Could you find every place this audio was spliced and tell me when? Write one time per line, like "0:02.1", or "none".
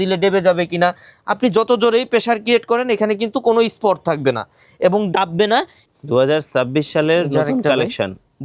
0:05.8